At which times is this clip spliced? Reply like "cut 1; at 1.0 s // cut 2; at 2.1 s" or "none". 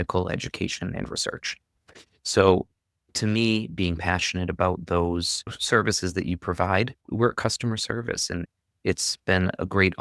cut 1; at 5.6 s // cut 2; at 7.0 s // cut 3; at 8.4 s